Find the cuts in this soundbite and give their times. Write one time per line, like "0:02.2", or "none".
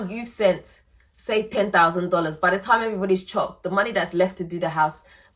none